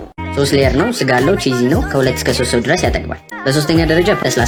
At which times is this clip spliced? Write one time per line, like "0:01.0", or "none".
none